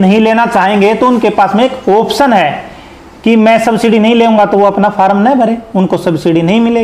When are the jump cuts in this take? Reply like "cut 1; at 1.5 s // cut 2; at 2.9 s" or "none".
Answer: none